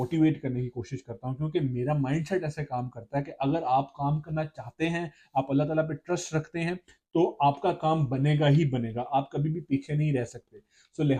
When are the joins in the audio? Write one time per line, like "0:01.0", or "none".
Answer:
none